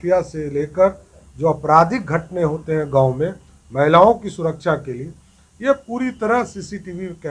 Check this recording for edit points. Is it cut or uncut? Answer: uncut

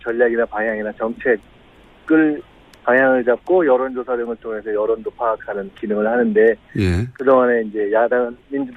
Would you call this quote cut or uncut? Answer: cut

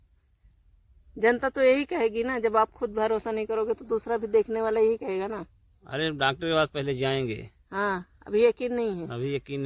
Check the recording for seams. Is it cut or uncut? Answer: uncut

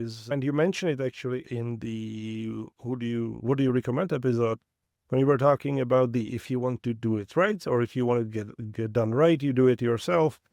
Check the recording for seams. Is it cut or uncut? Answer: uncut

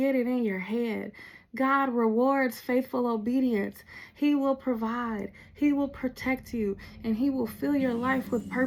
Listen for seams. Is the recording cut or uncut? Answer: uncut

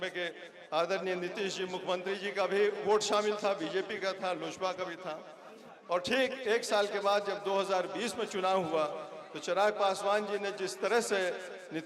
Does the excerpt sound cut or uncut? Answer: uncut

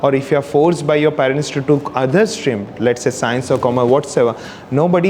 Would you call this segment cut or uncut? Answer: uncut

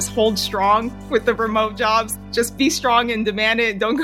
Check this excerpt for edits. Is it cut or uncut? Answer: cut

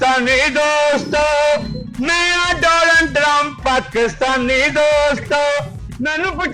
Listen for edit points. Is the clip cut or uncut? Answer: uncut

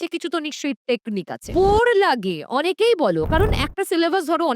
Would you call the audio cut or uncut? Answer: cut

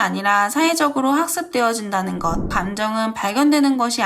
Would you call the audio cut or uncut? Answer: cut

